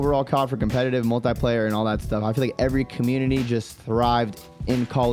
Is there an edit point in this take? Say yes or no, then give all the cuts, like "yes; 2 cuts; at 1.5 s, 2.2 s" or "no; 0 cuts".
no; 0 cuts